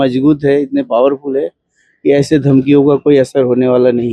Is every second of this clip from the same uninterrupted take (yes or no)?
yes